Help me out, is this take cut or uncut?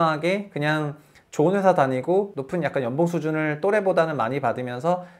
uncut